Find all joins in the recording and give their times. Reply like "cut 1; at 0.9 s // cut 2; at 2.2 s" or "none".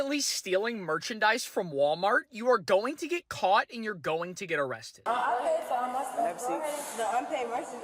cut 1; at 5.0 s

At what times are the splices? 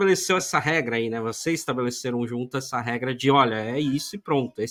none

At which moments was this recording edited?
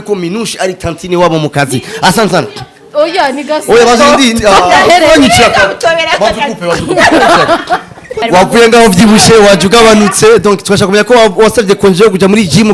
cut 1; at 8.2 s

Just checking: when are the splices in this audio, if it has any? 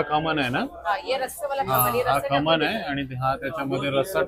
none

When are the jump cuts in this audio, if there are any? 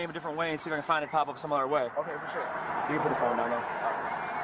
cut 1; at 1.3 s

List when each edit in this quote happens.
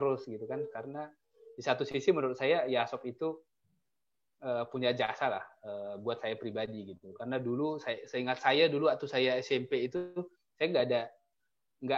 none

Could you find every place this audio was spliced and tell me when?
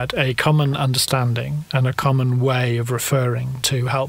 none

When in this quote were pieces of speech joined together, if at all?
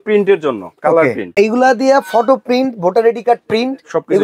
cut 1; at 1.3 s

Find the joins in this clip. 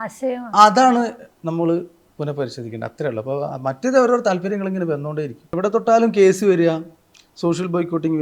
cut 1; at 5.5 s

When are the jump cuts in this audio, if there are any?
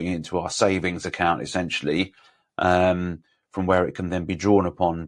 none

